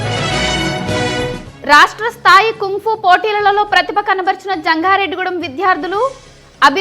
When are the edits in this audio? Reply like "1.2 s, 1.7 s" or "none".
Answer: 1.5 s